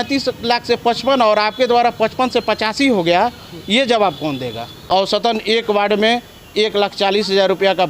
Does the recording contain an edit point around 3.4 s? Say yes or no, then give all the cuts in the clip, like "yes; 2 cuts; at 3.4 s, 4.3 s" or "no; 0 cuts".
no; 1 cut; at 5.2 s